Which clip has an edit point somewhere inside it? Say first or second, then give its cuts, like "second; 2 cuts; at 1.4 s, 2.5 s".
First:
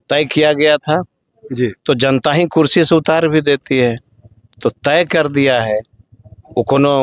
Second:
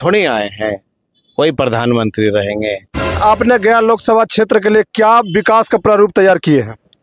second; 1 cut; at 3.2 s